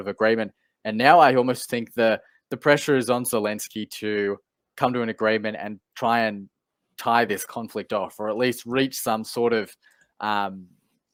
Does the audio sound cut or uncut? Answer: uncut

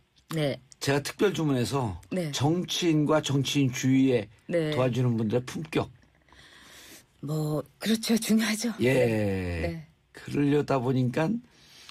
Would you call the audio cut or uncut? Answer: cut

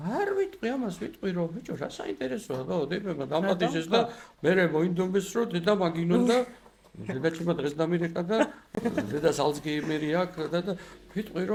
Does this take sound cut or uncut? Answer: uncut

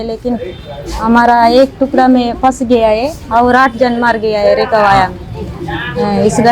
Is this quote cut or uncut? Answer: uncut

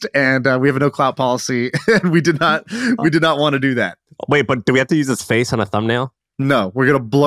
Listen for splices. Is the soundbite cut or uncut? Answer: cut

